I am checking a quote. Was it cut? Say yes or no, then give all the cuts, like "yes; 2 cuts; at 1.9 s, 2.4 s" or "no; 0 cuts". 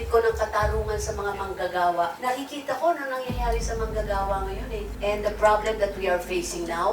yes; 1 cut; at 4.9 s